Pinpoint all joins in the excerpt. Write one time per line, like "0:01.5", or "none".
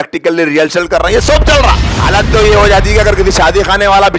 0:01.9